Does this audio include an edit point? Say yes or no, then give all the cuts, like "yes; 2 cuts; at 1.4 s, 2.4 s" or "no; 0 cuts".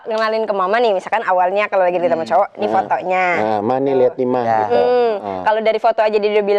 no; 0 cuts